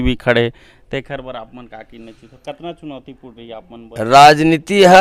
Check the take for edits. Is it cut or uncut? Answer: uncut